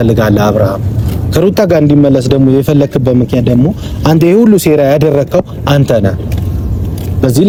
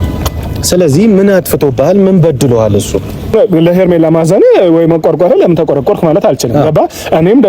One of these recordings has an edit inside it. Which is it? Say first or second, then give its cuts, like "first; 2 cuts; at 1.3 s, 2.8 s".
second; 1 cut; at 3.3 s